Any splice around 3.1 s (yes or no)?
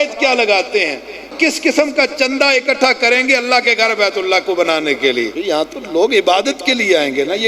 no